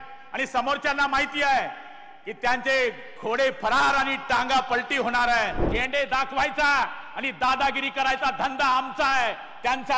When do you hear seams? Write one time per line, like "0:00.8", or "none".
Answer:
0:05.7